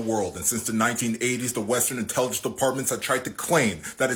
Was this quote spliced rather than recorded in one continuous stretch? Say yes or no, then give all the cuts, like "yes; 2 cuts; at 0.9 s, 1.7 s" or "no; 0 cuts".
no; 0 cuts